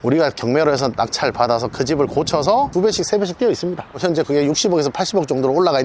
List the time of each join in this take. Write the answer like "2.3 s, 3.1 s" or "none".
2.7 s